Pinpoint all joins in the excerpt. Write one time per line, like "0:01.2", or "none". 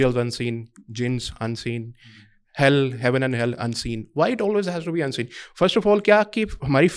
none